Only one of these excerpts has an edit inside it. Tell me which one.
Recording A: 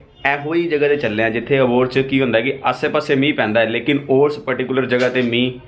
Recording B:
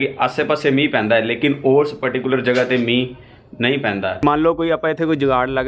B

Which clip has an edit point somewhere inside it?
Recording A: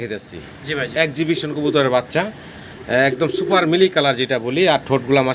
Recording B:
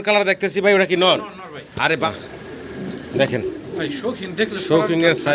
B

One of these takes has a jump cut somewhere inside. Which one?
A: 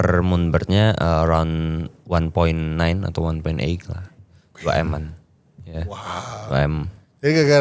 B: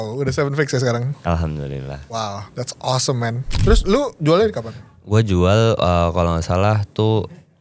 B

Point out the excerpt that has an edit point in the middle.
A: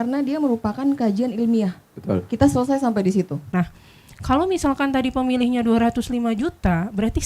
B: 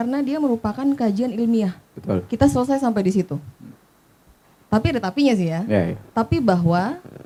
A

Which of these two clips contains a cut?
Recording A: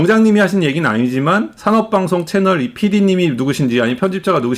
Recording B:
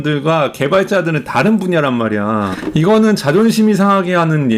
B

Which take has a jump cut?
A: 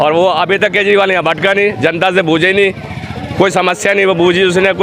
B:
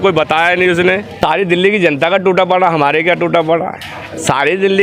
B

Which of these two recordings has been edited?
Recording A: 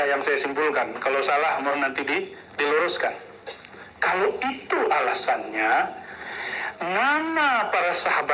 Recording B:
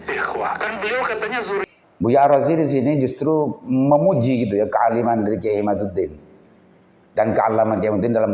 B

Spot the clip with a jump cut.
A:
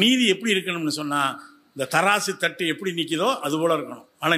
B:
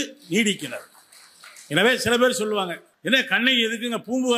B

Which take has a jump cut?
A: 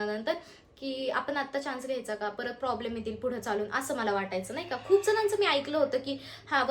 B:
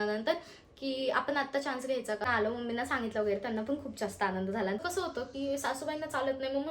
B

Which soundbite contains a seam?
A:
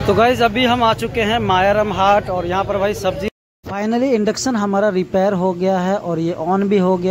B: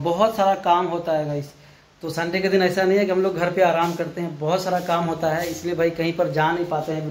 A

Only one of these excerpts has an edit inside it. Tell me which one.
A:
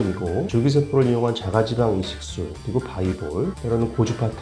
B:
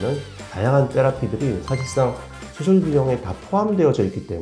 A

